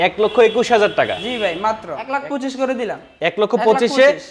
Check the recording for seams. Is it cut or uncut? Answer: cut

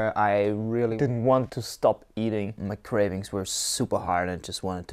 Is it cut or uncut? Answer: cut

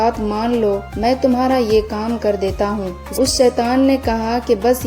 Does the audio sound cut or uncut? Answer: cut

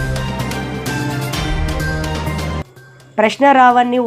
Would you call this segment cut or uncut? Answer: uncut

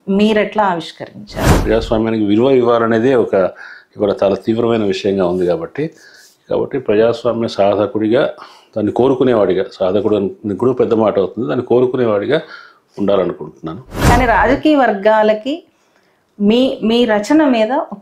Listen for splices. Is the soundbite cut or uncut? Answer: cut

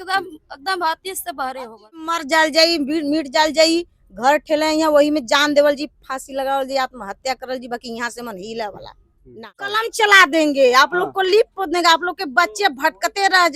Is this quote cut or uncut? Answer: cut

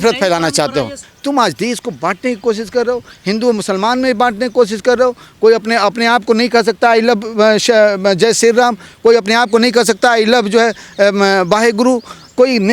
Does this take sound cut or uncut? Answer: cut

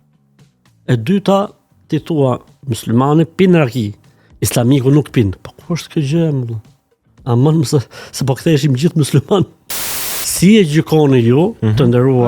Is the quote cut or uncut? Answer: cut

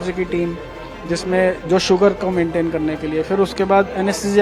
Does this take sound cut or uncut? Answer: uncut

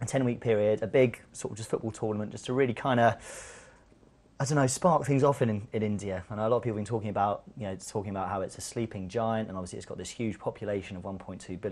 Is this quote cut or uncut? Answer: cut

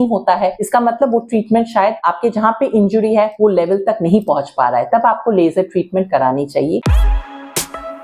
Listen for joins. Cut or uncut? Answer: cut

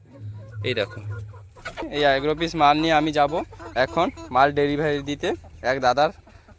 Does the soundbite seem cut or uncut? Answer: cut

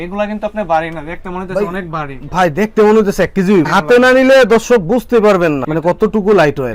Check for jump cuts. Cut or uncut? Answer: uncut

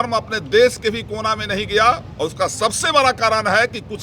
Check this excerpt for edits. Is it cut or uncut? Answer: uncut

